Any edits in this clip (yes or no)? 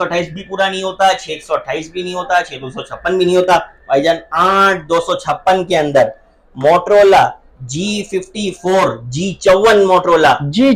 no